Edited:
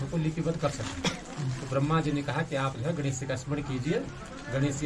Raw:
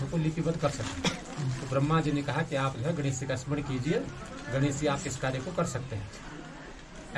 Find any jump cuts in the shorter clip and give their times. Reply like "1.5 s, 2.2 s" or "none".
none